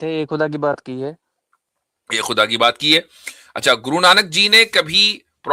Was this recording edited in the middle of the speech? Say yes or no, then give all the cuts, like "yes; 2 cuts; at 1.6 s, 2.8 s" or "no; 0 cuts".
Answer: no; 0 cuts